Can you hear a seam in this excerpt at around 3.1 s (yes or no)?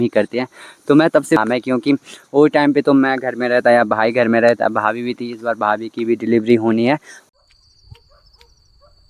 no